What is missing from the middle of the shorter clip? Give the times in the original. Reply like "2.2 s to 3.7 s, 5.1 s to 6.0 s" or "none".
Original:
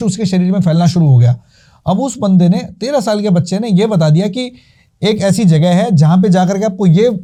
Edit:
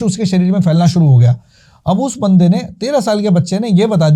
none